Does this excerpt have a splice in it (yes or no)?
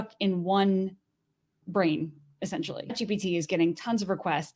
yes